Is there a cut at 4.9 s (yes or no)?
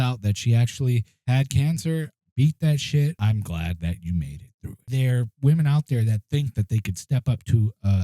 yes